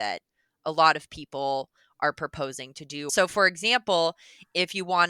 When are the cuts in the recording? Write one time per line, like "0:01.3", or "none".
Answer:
0:03.1